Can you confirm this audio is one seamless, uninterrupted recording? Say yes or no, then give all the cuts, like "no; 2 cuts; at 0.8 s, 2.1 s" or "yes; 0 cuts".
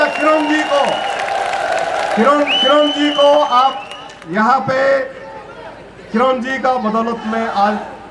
yes; 0 cuts